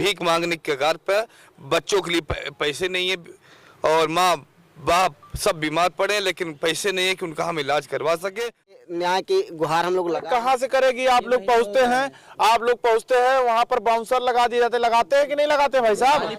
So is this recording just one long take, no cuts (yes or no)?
no